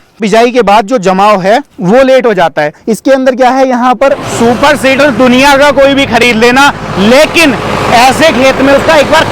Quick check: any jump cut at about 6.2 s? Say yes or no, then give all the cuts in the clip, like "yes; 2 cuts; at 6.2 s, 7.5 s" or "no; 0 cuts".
no; 1 cut; at 4.2 s